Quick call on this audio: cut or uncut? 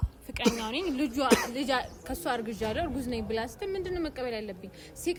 uncut